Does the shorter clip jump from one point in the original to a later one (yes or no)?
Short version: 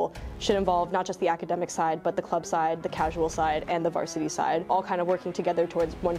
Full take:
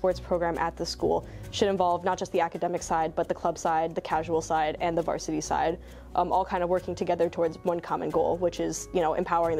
yes